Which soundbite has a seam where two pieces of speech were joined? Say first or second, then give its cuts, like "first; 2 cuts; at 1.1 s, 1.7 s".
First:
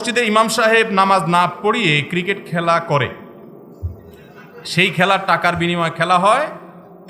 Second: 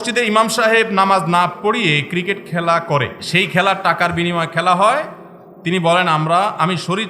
second; 1 cut; at 3.2 s